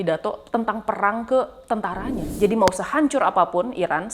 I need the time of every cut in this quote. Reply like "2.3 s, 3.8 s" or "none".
2.2 s